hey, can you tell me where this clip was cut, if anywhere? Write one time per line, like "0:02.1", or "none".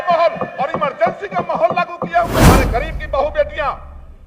0:02.4